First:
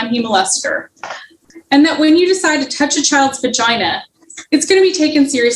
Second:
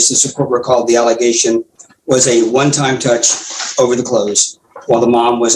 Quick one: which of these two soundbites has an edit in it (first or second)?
first